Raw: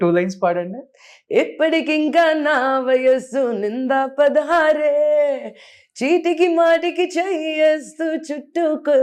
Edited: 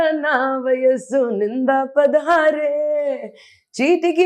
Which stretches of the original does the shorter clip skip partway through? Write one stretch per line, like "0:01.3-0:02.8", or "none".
none